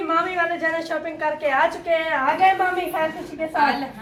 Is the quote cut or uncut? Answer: uncut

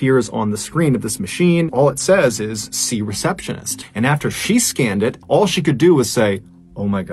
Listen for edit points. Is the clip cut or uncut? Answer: cut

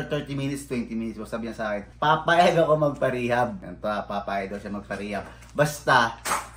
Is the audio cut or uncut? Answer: cut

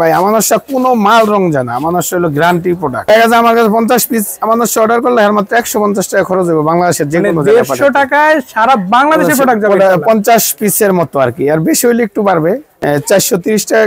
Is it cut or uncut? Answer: cut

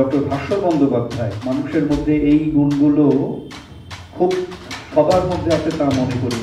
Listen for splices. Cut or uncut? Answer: cut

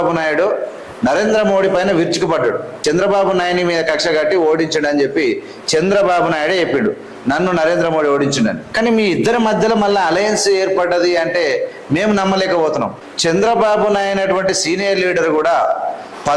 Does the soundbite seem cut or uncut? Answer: cut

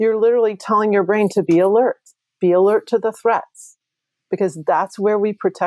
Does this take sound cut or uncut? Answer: uncut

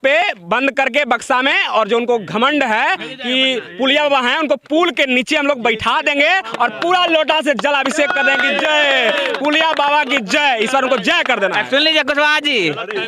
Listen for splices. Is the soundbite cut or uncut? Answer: uncut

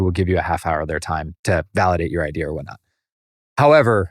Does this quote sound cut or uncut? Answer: cut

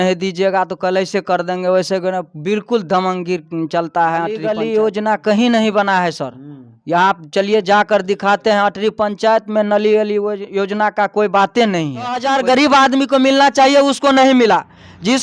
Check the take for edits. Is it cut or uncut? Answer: cut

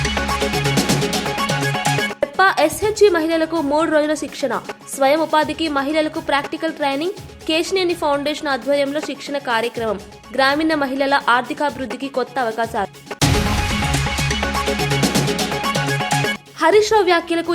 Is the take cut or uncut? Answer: cut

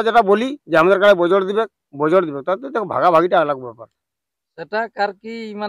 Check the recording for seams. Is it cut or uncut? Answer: uncut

